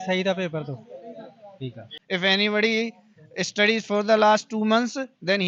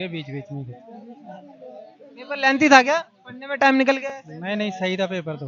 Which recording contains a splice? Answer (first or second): first